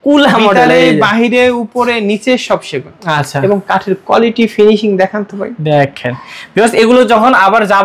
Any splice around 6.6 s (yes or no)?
no